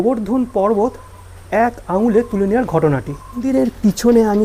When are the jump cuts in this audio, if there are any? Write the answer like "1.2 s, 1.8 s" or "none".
3.4 s